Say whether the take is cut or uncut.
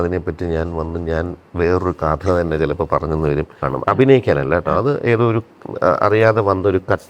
cut